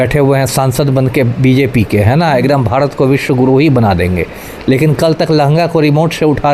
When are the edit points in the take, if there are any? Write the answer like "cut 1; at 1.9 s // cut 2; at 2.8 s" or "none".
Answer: none